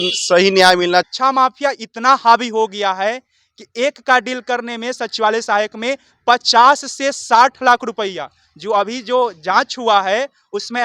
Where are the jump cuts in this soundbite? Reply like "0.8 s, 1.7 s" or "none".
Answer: 1.1 s